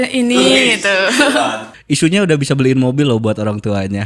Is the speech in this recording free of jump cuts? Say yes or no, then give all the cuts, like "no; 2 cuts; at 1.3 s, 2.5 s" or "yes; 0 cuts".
no; 1 cut; at 1.7 s